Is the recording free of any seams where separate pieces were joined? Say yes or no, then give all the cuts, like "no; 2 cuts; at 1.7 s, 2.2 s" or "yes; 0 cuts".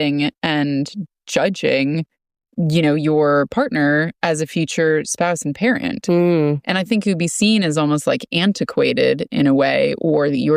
yes; 0 cuts